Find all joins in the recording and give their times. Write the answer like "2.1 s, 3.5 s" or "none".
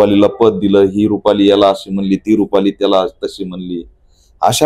none